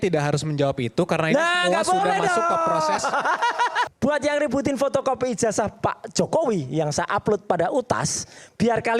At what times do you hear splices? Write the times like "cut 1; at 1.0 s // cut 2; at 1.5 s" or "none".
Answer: cut 1; at 3.9 s